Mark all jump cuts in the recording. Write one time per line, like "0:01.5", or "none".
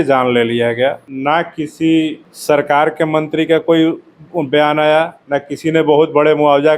0:01.1
0:02.3
0:05.2